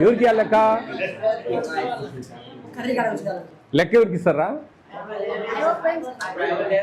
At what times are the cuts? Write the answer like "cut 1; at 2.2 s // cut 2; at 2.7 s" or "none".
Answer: none